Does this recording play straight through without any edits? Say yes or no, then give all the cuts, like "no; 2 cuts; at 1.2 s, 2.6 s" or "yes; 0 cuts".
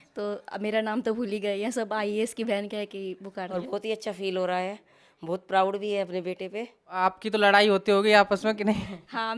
no; 2 cuts; at 3.5 s, 6.8 s